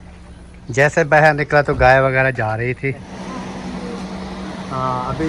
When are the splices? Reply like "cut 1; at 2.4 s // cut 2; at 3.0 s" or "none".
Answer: cut 1; at 3.1 s